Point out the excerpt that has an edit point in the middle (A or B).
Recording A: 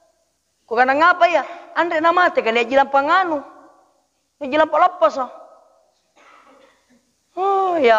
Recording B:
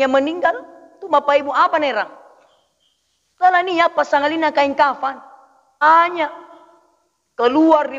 B